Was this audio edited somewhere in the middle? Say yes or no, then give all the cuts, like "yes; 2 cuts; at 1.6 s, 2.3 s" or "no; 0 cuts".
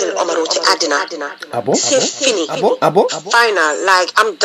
yes; 1 cut; at 3.2 s